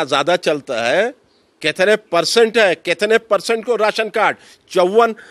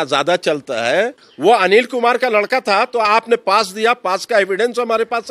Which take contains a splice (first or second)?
second